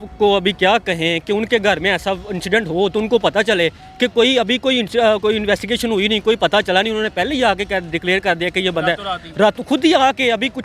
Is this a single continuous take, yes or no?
yes